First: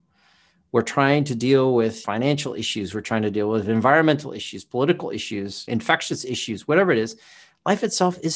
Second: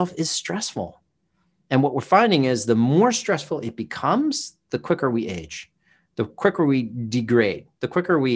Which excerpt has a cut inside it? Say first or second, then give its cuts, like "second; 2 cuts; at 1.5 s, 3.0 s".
first; 2 cuts; at 2.0 s, 5.6 s